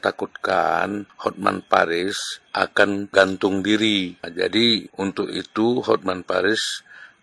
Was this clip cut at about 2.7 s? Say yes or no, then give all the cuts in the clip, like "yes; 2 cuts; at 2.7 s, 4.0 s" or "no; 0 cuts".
yes; 4 cuts; at 1.1 s, 2.7 s, 4.3 s, 4.9 s